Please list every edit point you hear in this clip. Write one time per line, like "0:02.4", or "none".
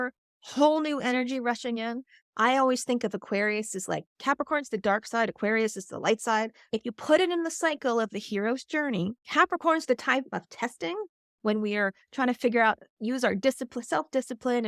0:06.6
0:09.2